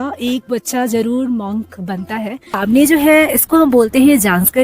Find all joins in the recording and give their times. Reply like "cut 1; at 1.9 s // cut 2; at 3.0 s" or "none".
cut 1; at 2.6 s